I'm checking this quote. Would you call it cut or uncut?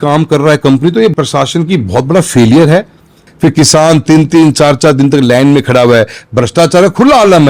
cut